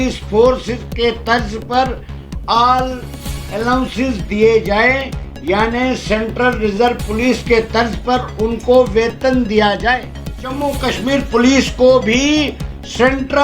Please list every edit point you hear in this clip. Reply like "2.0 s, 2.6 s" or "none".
10.6 s